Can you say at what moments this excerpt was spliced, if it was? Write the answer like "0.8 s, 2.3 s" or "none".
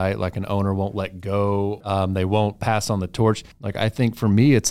1.9 s, 3.6 s